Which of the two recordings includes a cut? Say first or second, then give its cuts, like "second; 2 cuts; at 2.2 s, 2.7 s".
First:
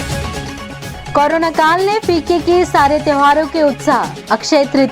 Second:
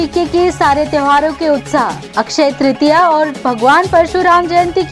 first; 1 cut; at 0.9 s